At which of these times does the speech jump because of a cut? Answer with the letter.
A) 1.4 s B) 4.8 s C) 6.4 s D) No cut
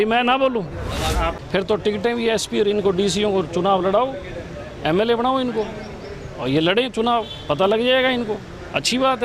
A